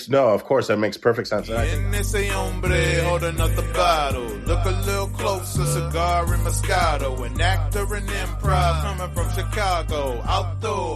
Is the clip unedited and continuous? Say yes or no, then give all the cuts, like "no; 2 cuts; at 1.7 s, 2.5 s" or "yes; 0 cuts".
no; 1 cut; at 1.5 s